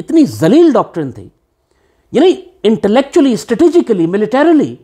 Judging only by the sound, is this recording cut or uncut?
uncut